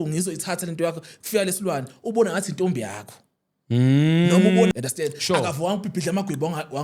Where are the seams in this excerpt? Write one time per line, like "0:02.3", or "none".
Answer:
0:04.7